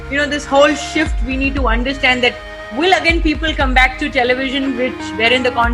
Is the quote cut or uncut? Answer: uncut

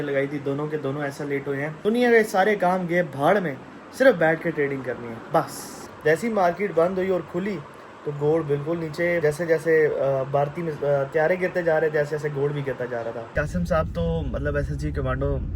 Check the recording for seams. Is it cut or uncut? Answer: cut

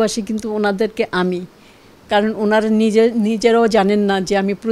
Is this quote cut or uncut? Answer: uncut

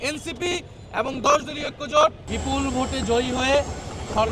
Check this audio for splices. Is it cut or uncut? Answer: cut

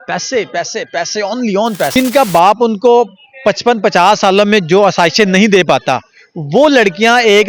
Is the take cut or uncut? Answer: cut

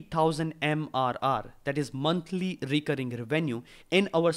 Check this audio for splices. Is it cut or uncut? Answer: uncut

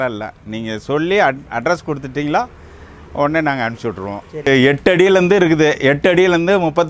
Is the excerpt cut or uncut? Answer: cut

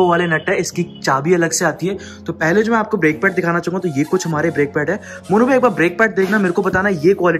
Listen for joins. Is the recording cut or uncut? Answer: uncut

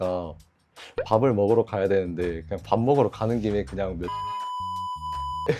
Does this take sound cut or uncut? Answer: uncut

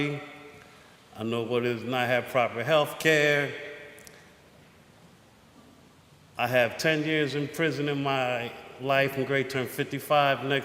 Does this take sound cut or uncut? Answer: cut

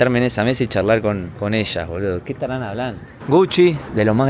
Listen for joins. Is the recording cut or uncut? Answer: cut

